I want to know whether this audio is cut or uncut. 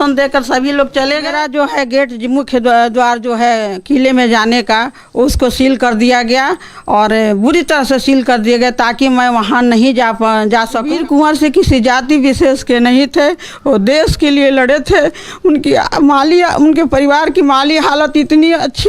cut